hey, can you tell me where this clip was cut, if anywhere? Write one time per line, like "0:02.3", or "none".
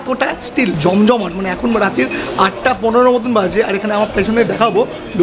none